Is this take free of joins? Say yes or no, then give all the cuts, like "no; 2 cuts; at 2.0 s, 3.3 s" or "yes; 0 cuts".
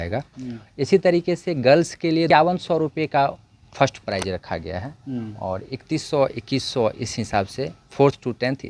no; 1 cut; at 2.3 s